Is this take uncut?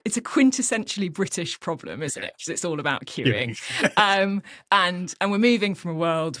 yes; 0 cuts

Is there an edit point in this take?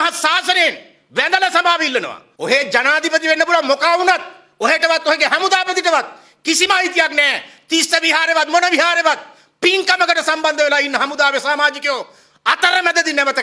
no; 0 cuts

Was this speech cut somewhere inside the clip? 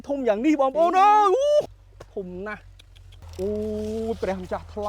yes; 2 cuts; at 1.6 s, 3.1 s

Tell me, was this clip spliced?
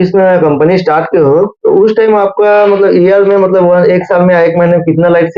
no; 0 cuts

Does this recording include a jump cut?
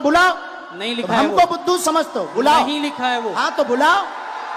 no; 0 cuts

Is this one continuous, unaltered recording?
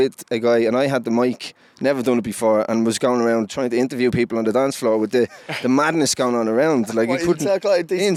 yes; 0 cuts

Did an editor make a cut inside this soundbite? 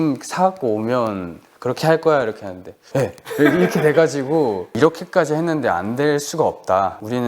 yes; 1 cut; at 4.7 s

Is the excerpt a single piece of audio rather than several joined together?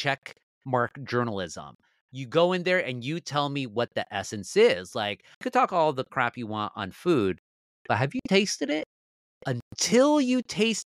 no; 1 cut; at 5.4 s

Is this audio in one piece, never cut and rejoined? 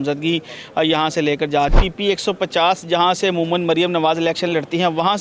no; 1 cut; at 1.8 s

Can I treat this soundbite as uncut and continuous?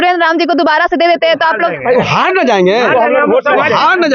yes; 0 cuts

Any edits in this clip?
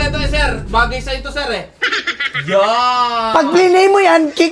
no; 0 cuts

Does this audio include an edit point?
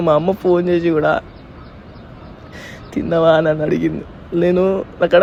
no; 0 cuts

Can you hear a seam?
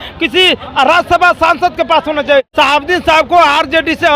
yes; 1 cut; at 2.5 s

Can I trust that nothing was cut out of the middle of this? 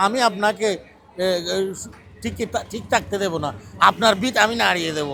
yes; 0 cuts

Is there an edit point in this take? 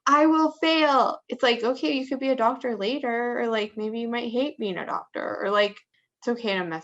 yes; 2 cuts; at 1.2 s, 5.8 s

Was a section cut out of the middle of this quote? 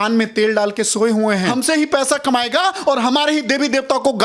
yes; 1 cut; at 1.5 s

